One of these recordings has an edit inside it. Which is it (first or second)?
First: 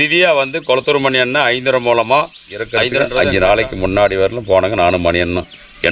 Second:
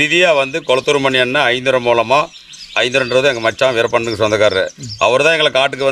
first